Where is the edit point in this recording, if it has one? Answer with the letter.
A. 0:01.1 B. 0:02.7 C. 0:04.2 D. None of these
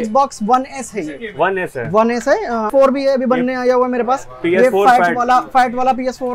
B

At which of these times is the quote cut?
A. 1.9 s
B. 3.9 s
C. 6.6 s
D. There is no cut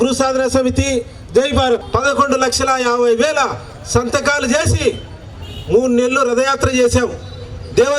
A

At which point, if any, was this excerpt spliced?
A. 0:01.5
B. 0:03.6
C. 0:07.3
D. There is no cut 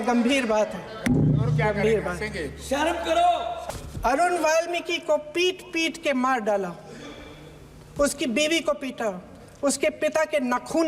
B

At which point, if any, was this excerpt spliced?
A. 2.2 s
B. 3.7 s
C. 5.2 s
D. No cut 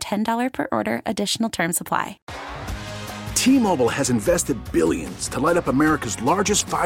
A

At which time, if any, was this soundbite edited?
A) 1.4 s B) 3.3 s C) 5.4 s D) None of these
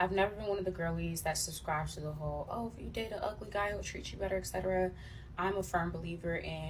D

